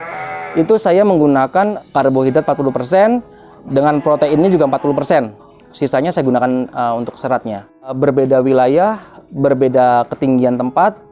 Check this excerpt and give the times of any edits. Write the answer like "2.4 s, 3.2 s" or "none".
1.7 s, 7.9 s